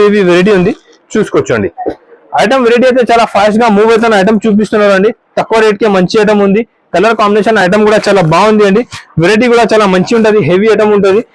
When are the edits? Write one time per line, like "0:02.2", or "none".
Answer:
none